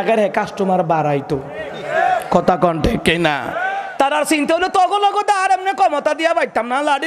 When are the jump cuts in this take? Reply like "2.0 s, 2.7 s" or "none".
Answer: 3.7 s